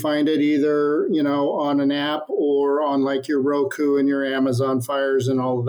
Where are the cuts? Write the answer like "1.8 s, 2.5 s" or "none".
none